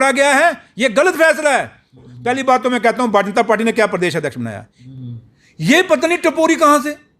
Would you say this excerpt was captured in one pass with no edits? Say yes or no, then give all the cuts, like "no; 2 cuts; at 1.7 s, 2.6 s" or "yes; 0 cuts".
no; 2 cuts; at 2.1 s, 4.8 s